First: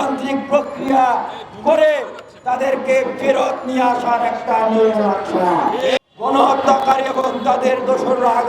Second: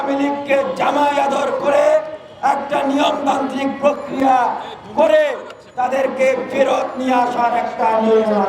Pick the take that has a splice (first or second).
first